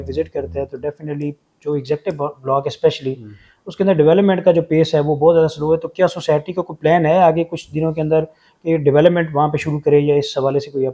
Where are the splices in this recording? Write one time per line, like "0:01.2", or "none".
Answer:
none